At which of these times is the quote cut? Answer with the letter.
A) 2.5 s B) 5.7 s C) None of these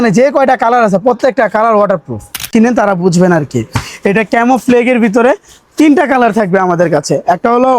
A